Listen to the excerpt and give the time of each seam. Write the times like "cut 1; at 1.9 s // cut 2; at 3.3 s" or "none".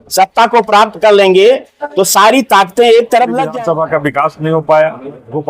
cut 1; at 3.4 s